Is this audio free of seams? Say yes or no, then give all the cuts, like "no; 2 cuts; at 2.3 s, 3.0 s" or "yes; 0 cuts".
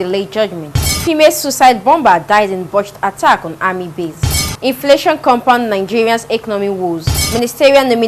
yes; 0 cuts